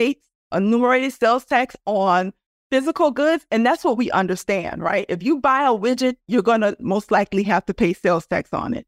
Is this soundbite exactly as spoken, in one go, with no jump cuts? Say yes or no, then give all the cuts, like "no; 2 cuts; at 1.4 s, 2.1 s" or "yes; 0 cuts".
yes; 0 cuts